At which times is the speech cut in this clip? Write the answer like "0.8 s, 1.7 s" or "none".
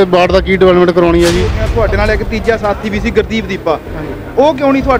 1.6 s